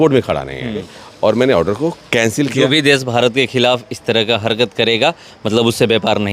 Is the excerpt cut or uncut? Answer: cut